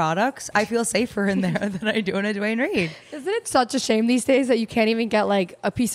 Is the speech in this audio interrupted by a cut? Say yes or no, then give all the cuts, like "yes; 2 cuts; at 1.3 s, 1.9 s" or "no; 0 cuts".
no; 0 cuts